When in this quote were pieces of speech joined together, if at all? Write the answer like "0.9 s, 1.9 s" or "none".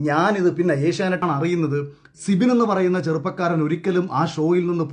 1.2 s

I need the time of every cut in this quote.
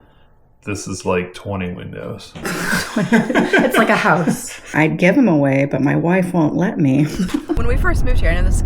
4.7 s, 7.6 s

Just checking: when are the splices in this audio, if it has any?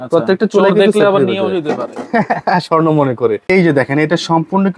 3.4 s

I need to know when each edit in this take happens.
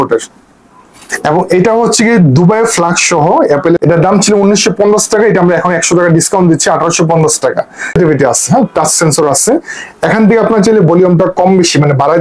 3.8 s, 7.9 s

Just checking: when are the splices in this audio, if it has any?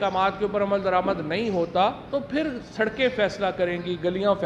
2.0 s

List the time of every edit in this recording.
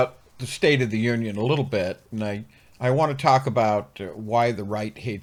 none

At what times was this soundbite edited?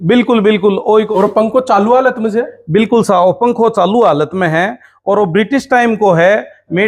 1.0 s

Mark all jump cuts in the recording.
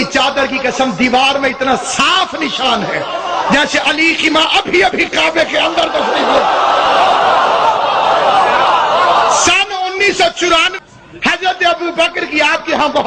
10.8 s

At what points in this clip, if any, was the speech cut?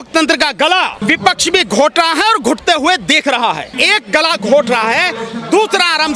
1.0 s, 3.7 s

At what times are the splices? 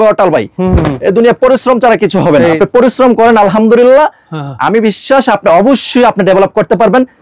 2.6 s

